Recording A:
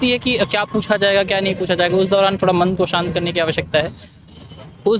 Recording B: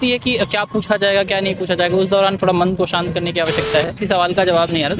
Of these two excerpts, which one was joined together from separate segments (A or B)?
B